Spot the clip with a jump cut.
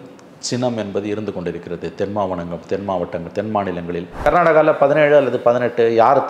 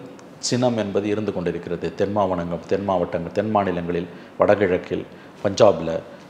first; 1 cut; at 4.1 s

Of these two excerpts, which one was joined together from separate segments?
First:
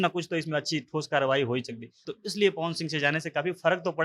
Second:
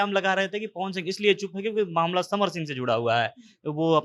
first; 1 cut; at 1.9 s

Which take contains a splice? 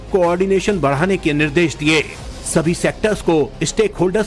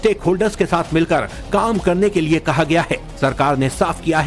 second; 1 cut; at 2.3 s

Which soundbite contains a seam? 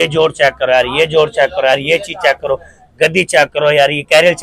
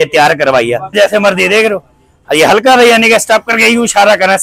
second; 1 cut; at 0.9 s

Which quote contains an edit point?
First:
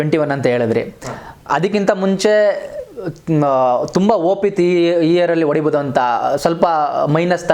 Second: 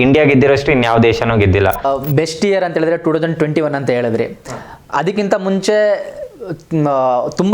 second; 1 cut; at 1.8 s

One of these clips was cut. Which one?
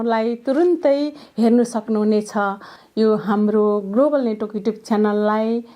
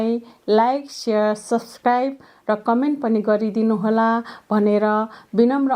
first; 1 cut; at 2.7 s

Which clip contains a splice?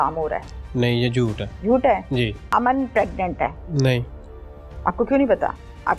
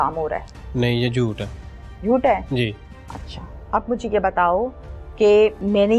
first; 3 cuts; at 1.5 s, 2.4 s, 3.6 s

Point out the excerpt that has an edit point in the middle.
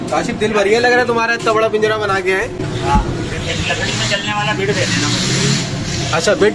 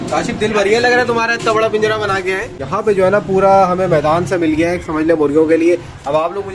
second; 1 cut; at 2.5 s

